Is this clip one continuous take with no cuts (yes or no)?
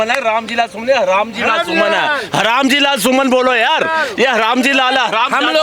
yes